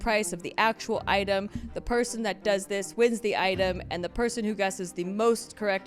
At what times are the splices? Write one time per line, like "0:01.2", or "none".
none